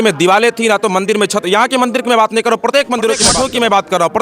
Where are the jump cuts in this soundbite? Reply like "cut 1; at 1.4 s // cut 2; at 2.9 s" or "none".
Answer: cut 1; at 3.3 s